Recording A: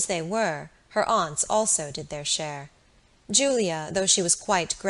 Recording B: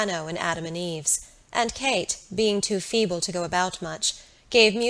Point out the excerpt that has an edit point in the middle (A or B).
A